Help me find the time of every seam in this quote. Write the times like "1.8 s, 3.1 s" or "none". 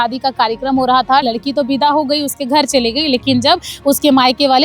1.2 s